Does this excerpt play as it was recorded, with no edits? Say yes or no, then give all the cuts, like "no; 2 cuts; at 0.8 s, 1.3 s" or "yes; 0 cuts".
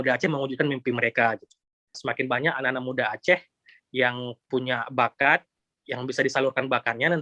no; 1 cut; at 1.9 s